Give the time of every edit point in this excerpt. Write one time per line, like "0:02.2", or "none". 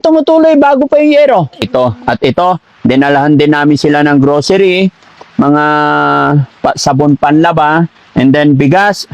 0:01.7